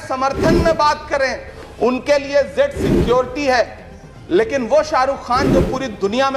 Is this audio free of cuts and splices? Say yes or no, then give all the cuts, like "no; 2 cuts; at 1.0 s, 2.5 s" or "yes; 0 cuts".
no; 1 cut; at 1.5 s